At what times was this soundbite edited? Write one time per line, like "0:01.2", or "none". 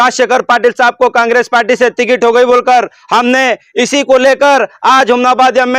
none